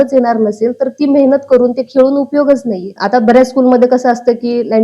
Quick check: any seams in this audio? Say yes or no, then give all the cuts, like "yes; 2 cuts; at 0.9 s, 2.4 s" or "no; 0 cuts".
yes; 1 cut; at 2.9 s